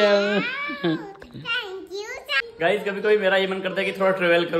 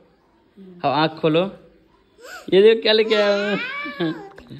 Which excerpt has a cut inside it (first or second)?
first